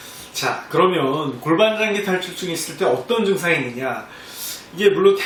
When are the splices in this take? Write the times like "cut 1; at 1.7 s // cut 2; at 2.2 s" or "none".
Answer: none